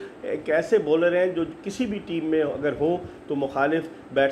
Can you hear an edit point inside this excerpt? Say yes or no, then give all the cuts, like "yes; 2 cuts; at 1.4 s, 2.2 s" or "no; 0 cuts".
no; 0 cuts